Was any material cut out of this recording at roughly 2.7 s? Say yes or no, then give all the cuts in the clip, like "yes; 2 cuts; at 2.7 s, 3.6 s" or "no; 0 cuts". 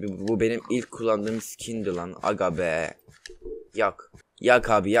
no; 1 cut; at 4.1 s